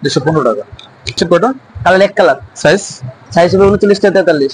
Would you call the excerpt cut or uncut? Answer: cut